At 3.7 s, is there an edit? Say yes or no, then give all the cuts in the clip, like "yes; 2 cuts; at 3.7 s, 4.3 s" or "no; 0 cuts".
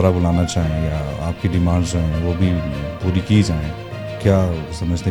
no; 0 cuts